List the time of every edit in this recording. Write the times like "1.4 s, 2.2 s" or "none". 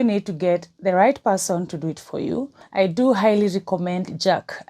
2.6 s